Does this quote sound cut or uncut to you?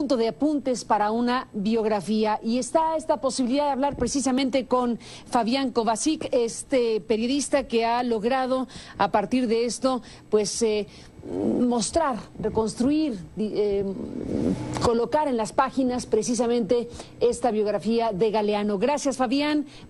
cut